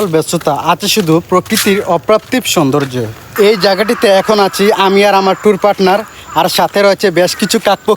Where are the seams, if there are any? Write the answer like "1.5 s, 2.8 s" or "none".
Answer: 3.2 s